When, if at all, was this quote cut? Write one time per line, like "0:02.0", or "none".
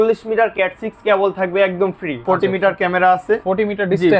0:02.2

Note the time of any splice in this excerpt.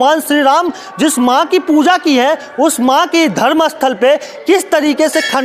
none

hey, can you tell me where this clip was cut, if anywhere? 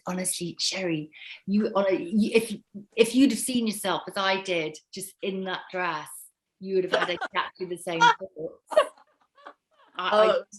none

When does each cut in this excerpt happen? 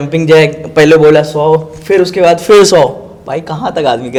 none

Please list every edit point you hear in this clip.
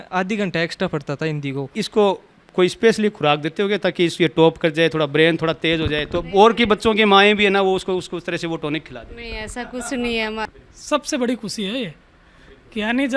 0:01.8
0:10.5

